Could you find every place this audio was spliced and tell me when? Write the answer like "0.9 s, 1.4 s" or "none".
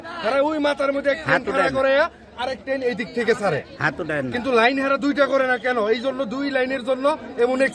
none